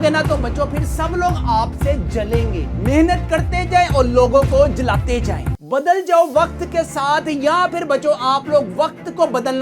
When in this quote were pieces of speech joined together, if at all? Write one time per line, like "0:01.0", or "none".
0:05.5